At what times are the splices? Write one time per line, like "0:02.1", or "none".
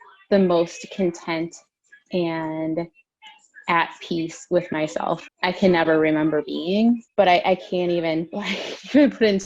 0:07.1